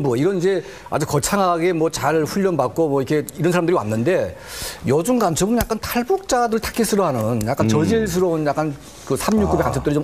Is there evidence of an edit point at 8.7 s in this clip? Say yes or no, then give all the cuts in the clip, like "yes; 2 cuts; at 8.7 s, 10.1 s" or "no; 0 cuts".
yes; 1 cut; at 8.7 s